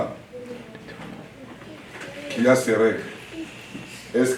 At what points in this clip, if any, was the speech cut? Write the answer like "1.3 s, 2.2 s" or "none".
none